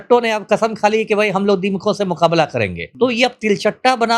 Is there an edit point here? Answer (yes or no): yes